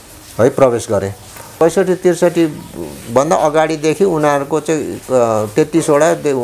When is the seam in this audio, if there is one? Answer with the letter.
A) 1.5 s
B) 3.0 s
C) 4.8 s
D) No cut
A